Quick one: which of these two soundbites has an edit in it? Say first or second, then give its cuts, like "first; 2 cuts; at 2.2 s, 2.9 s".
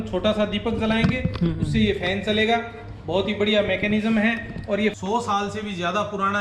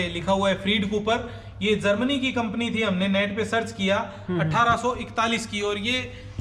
first; 1 cut; at 5.0 s